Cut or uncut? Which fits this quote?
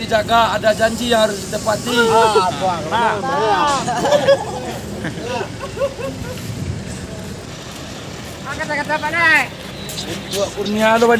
cut